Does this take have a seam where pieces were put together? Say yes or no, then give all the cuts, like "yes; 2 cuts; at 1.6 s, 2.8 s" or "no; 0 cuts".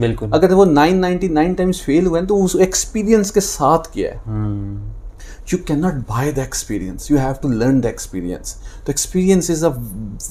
no; 0 cuts